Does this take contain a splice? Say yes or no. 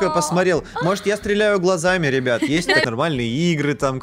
yes